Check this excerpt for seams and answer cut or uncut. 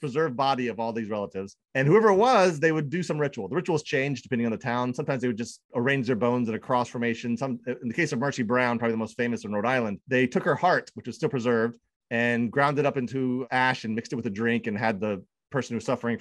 cut